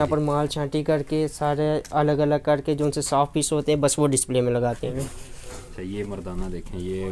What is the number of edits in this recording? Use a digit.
1